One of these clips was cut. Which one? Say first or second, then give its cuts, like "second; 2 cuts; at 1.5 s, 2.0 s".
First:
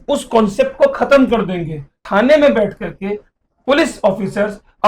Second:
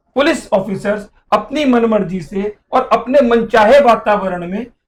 first; 1 cut; at 2.0 s